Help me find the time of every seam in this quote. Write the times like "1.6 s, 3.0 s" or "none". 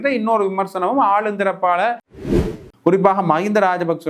2.4 s